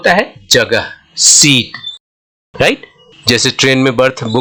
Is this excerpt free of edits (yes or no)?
yes